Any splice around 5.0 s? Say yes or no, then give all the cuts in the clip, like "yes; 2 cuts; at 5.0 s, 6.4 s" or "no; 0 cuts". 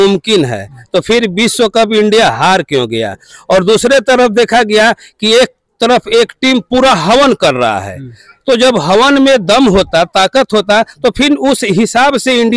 no; 0 cuts